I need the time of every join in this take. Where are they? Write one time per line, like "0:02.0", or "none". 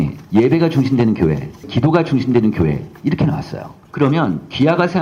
0:01.7
0:03.8